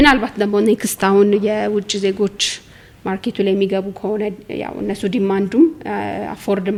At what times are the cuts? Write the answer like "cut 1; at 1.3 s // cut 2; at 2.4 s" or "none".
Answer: none